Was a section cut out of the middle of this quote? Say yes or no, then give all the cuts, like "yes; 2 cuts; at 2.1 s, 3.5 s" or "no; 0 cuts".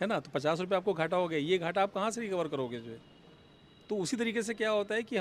no; 0 cuts